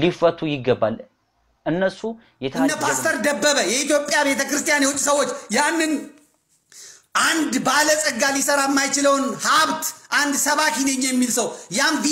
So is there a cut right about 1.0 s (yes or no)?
no